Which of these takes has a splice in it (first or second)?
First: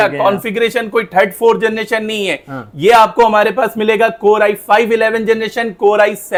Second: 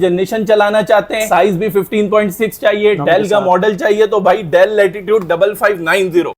second